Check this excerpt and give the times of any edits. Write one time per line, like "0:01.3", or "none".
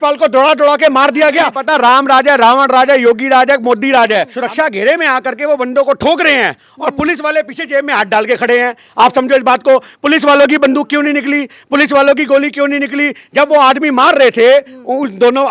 0:01.6
0:04.3